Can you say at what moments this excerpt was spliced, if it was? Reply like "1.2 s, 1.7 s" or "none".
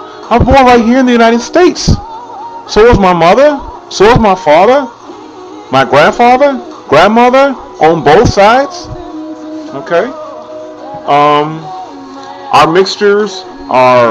10.7 s